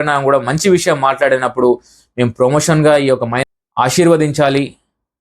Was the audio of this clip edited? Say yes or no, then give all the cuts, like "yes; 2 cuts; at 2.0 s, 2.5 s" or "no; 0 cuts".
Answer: yes; 1 cut; at 3.4 s